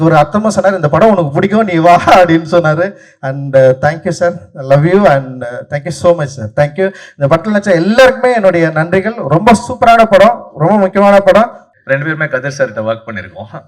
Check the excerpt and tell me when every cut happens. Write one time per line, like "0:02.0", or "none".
0:11.7